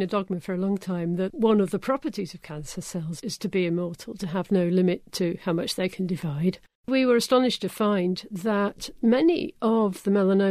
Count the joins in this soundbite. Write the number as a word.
three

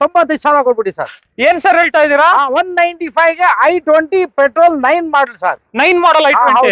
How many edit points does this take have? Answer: zero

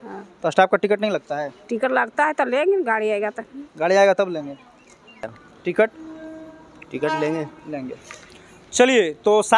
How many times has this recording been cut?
one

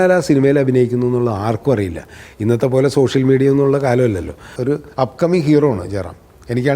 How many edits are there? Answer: one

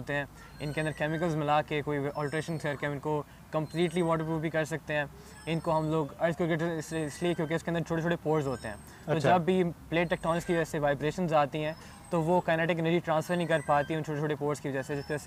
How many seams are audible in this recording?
zero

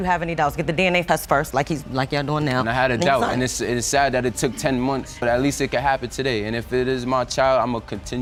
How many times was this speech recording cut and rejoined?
zero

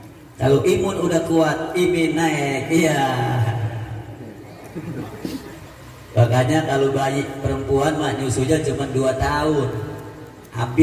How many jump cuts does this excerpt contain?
one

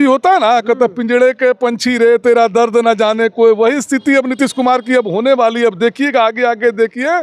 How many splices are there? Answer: zero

